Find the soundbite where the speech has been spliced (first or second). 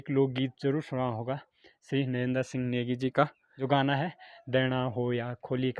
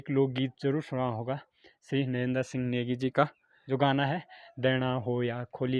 first